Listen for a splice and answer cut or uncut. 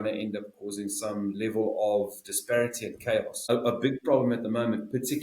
cut